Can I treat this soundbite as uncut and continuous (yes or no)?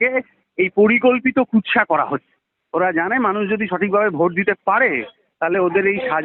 yes